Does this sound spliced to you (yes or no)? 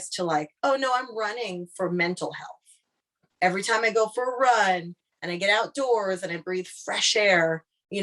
no